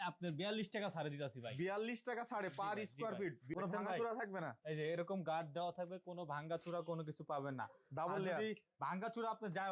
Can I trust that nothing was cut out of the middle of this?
no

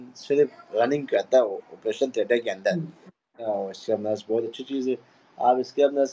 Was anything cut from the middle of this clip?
yes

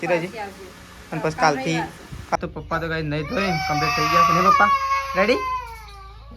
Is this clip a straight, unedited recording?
no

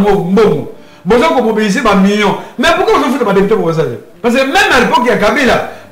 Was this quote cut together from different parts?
yes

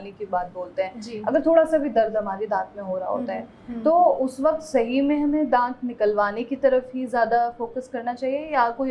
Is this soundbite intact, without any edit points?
yes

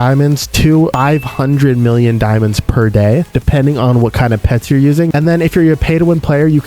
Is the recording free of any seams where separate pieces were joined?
no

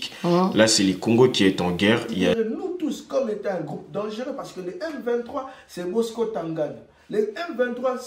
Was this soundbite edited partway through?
yes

